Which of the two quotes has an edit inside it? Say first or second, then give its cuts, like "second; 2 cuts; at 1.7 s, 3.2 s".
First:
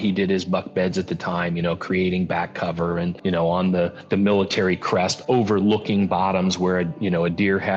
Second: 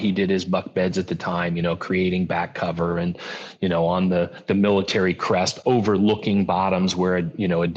first; 1 cut; at 3.2 s